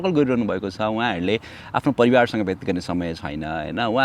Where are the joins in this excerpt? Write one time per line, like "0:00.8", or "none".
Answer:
none